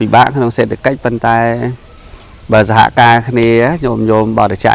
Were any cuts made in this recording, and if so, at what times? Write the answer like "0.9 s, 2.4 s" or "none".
none